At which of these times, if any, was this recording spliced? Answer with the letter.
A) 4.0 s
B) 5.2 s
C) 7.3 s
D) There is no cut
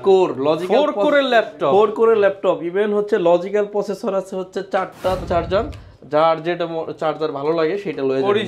B